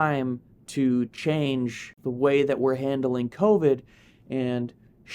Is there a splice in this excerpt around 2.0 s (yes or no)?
yes